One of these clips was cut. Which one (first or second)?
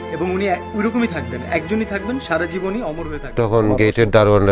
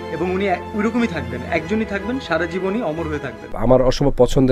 first